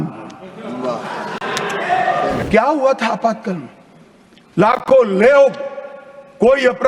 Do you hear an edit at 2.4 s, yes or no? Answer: yes